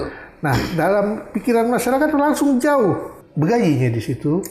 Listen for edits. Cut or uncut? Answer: cut